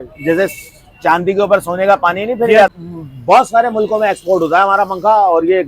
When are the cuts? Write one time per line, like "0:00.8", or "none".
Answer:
0:02.7